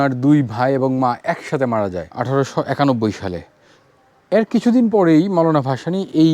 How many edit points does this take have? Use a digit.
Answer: 1